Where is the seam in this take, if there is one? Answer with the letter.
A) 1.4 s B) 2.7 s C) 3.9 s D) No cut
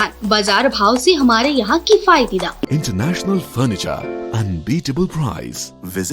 B